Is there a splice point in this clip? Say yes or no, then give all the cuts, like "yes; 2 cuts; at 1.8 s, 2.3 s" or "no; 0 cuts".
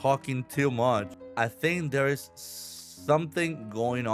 no; 0 cuts